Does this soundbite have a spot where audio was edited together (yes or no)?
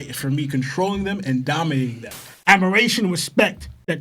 yes